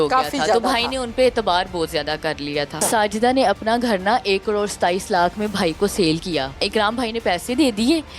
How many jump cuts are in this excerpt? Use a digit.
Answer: 2